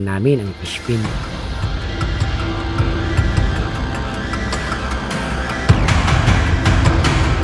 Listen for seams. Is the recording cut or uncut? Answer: uncut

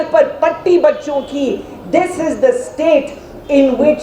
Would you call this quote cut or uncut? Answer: uncut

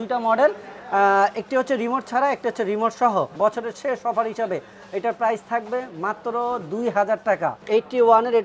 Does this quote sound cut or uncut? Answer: cut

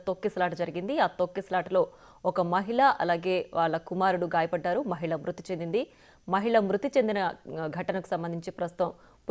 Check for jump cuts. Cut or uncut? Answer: uncut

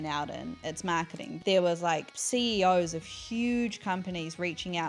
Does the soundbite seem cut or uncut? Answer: cut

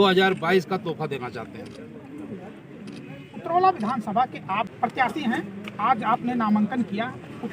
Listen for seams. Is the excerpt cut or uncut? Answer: uncut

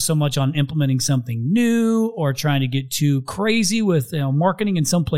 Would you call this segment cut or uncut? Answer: uncut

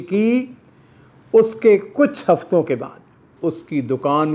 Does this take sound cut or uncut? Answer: cut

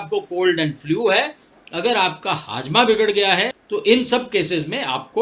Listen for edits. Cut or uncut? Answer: cut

